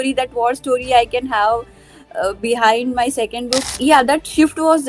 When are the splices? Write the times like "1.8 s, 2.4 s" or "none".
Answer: 3.7 s